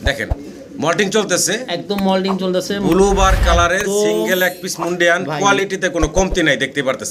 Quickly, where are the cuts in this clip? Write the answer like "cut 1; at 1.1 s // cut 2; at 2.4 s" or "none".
none